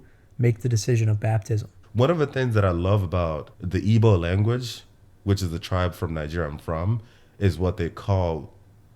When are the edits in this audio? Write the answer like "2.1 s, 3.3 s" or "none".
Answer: 1.8 s, 3.5 s